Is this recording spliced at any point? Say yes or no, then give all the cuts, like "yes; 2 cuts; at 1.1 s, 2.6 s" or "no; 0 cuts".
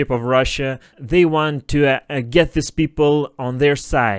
yes; 1 cut; at 0.9 s